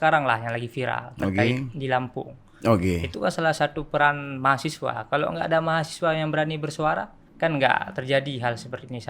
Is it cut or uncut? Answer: cut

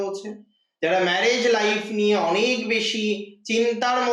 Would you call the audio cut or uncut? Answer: uncut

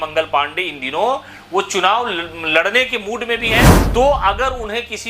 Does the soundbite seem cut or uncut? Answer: cut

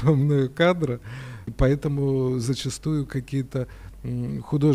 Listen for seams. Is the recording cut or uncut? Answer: cut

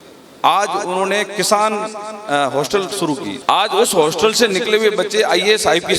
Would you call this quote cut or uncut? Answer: cut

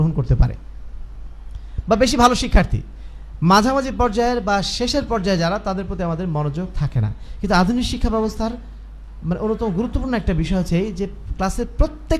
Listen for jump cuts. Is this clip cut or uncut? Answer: uncut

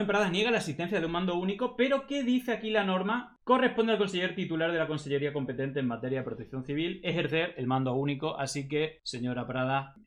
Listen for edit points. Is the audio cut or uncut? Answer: uncut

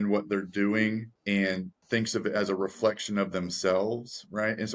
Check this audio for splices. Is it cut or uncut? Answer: cut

